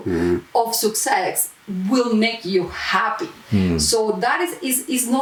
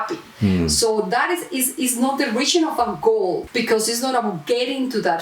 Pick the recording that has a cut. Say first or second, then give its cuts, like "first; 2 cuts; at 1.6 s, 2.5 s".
second; 1 cut; at 3.4 s